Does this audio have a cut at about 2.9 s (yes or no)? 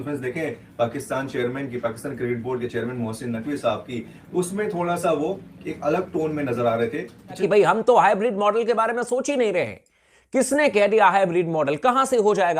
no